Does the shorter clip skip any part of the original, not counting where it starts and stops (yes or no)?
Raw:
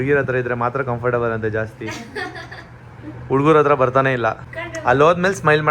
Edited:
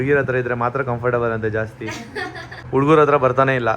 yes